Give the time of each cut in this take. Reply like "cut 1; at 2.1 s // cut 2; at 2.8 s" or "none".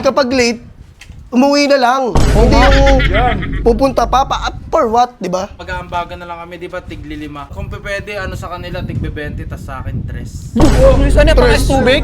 cut 1; at 5.5 s // cut 2; at 7.5 s